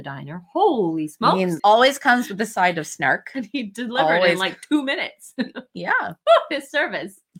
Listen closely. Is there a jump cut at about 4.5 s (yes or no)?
no